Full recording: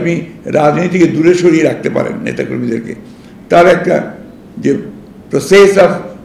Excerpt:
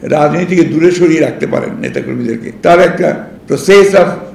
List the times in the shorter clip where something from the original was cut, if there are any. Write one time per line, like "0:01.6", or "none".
0:02.5
0:03.3